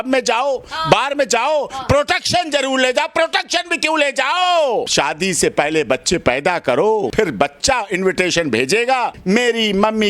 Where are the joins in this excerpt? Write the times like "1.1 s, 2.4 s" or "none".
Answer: 4.9 s, 7.1 s, 9.2 s